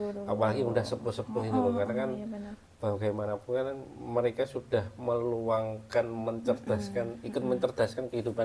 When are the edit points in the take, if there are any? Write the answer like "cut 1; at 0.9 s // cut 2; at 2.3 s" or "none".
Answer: none